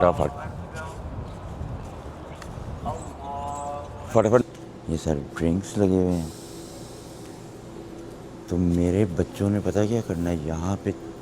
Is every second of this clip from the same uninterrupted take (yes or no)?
no